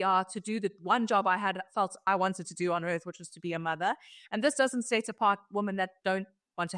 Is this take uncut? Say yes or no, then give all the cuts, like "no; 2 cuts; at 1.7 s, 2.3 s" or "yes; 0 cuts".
yes; 0 cuts